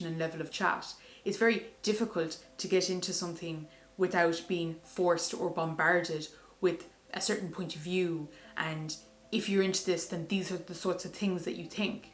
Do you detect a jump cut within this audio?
no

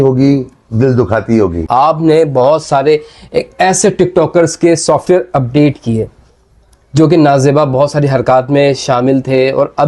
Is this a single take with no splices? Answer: no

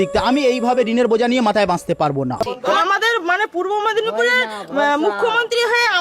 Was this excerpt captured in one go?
no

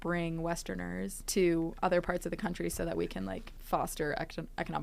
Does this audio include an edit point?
yes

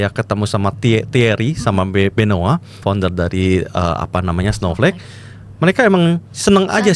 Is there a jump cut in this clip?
yes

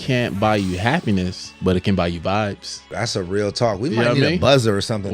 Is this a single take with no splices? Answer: no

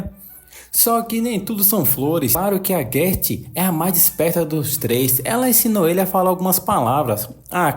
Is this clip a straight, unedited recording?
no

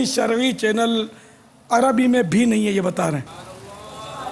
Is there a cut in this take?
yes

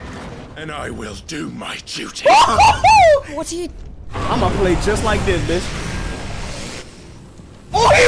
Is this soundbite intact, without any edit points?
yes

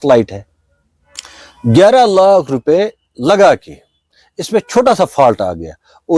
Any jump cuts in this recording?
no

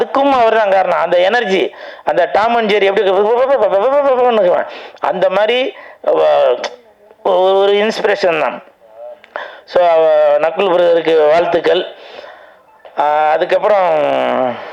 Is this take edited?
no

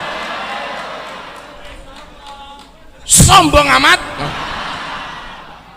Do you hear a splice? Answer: no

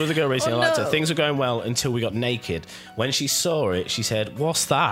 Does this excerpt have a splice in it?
no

